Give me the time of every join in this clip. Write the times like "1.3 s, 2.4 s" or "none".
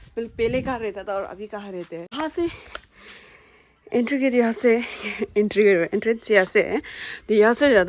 2.1 s